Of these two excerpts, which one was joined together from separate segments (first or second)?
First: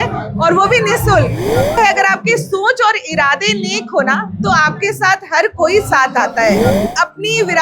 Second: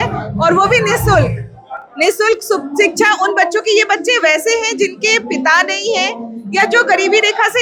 first